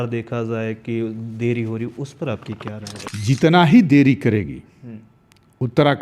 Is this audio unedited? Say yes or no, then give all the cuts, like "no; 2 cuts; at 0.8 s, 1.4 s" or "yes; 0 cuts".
no; 1 cut; at 3.1 s